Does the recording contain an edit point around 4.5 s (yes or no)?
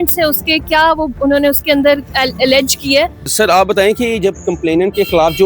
no